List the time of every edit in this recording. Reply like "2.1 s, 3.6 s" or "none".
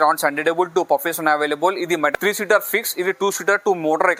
2.1 s